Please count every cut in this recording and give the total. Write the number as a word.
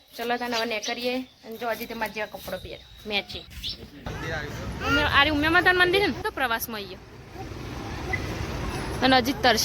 one